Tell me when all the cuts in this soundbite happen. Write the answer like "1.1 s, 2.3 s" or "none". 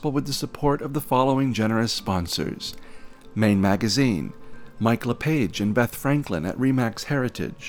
none